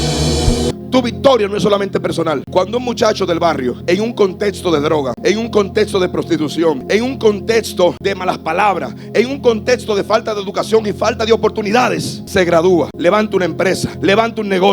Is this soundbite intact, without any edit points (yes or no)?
no